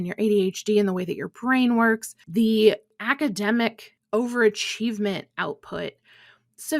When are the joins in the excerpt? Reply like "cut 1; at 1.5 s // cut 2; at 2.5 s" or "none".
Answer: cut 1; at 2.2 s // cut 2; at 3.0 s // cut 3; at 3.9 s